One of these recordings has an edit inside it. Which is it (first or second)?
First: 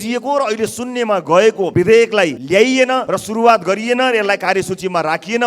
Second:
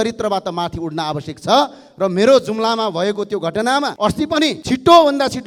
first